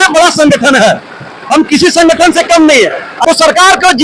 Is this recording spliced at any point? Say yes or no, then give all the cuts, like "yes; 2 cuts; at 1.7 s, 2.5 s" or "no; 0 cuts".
yes; 1 cut; at 3.1 s